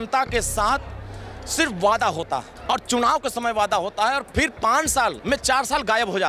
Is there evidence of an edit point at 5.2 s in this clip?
yes; 2 cuts; at 2.5 s, 5.2 s

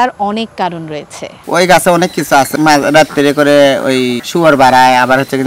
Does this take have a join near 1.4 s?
yes; 3 cuts; at 1.4 s, 2.5 s, 4.2 s

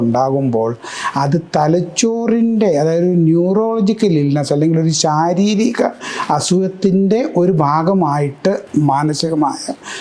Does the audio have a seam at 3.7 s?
no; 1 cut; at 8.6 s

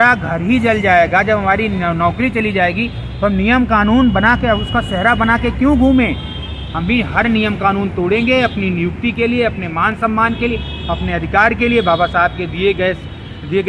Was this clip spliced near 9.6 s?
no; 0 cuts

